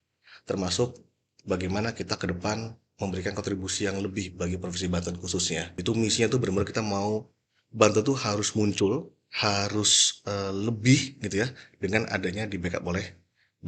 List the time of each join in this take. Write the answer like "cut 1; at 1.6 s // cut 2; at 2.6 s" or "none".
cut 1; at 5.7 s